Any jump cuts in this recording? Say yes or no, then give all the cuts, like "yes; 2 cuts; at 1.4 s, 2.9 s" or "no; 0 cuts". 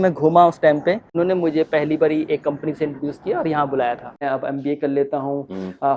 yes; 2 cuts; at 1.1 s, 4.2 s